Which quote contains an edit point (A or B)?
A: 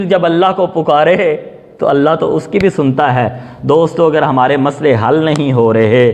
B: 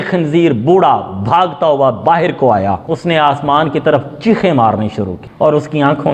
B